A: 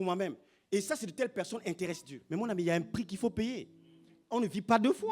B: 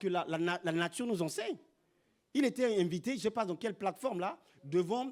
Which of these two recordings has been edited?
A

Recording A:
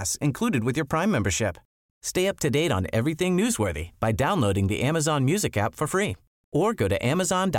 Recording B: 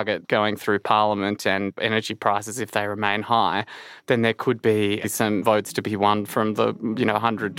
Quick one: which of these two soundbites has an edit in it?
B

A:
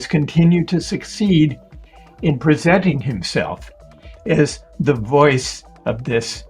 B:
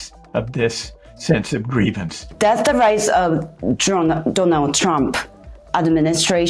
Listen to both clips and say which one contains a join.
B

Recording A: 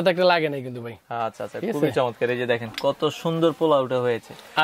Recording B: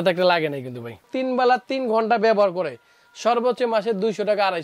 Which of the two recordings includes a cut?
B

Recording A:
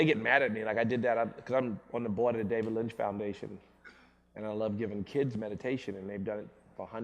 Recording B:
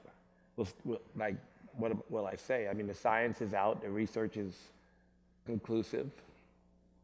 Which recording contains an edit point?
A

